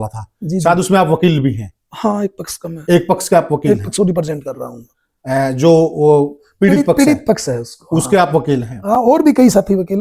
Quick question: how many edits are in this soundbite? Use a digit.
0